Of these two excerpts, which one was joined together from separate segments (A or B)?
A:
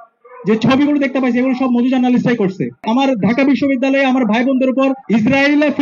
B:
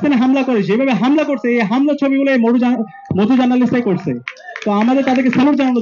A